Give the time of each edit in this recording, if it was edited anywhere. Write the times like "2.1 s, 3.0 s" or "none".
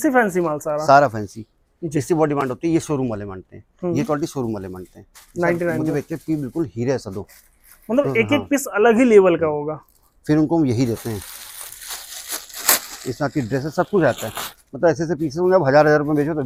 none

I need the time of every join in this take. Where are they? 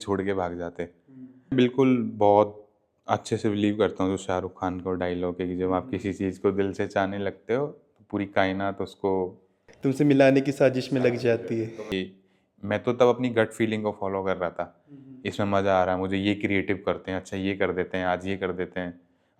1.4 s, 11.8 s

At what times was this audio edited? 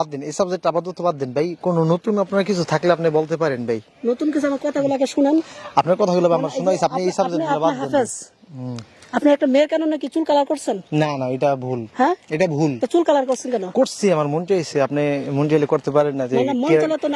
none

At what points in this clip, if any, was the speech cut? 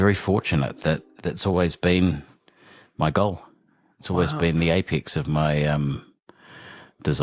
none

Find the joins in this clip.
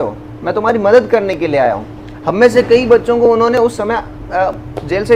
none

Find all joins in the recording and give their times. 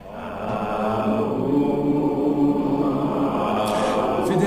3.5 s

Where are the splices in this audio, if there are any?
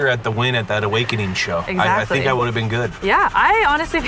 1.7 s, 2.9 s

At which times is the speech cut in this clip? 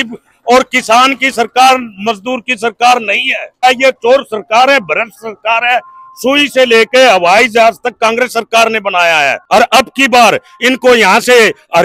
3.6 s, 9.4 s

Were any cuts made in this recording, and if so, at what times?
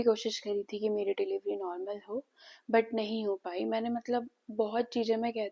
none

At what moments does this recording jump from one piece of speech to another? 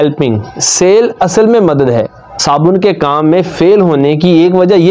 2.3 s

